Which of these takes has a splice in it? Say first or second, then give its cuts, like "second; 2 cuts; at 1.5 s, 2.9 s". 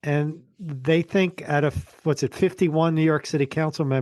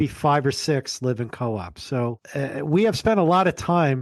second; 1 cut; at 2.2 s